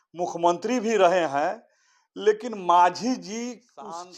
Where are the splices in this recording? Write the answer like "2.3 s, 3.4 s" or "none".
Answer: none